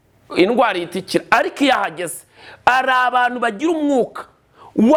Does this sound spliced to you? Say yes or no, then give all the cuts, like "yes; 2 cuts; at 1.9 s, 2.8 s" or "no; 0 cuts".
no; 0 cuts